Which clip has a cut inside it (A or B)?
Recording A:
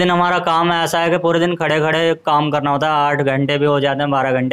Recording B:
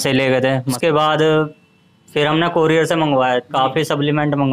B